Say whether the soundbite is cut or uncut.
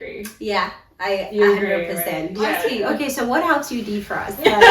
cut